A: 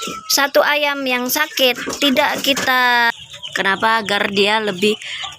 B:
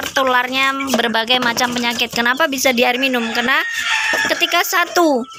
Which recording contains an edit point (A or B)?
A